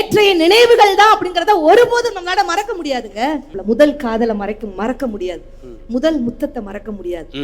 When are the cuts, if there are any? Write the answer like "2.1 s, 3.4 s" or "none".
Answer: 3.5 s